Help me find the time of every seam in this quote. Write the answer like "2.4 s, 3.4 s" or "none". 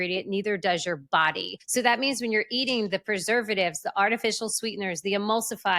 1.5 s